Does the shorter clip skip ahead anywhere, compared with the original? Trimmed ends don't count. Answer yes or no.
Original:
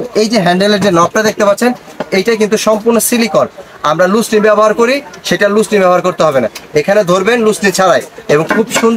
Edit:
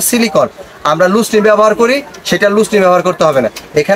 no